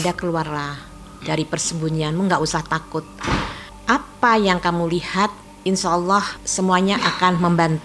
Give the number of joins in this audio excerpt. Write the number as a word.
three